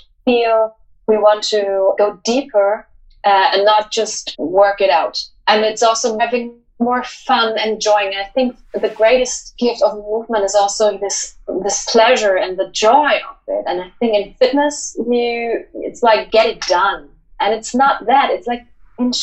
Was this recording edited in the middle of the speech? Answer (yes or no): yes